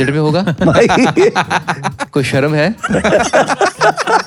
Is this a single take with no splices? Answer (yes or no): yes